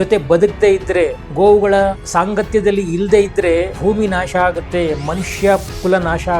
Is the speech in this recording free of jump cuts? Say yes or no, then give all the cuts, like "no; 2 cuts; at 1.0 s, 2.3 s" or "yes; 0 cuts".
no; 3 cuts; at 1.2 s, 2.0 s, 3.7 s